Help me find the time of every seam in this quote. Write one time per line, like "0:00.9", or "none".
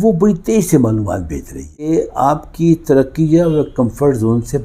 0:01.9